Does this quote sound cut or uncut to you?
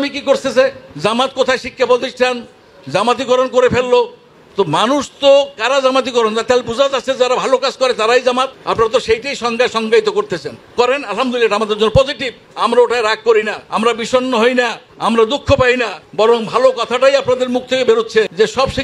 uncut